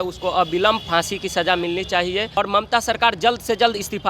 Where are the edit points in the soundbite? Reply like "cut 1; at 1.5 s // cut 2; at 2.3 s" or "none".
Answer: cut 1; at 2.4 s